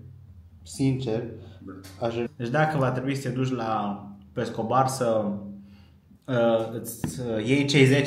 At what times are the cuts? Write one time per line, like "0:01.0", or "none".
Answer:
0:02.3